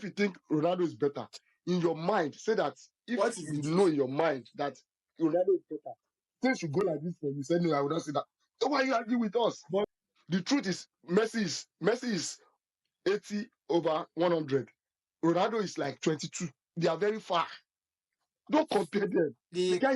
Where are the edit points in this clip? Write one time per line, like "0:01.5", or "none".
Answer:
0:09.9